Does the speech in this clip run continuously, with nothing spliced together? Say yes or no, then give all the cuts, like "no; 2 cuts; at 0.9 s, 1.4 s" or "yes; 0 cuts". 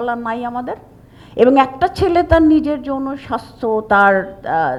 yes; 0 cuts